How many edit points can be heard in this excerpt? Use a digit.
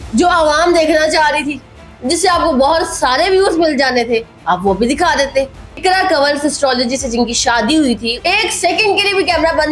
2